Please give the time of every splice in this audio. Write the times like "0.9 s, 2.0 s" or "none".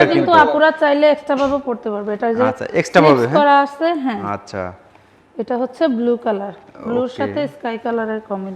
none